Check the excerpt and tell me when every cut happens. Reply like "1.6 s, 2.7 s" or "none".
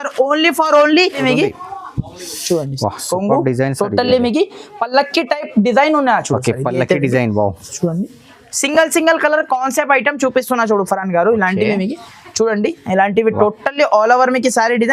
1.2 s